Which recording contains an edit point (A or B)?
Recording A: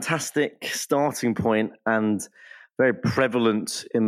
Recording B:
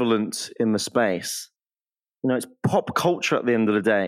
B